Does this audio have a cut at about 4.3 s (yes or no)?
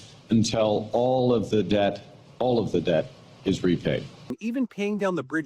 yes